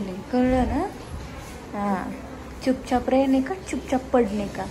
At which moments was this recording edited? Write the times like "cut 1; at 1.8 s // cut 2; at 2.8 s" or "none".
none